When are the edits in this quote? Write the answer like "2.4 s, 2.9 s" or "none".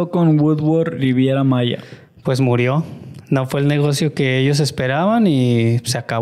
none